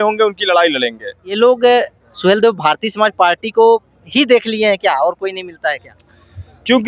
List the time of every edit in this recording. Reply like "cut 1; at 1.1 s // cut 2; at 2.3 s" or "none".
cut 1; at 1.2 s